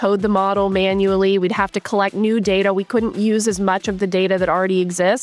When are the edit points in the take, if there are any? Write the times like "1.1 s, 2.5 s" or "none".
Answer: none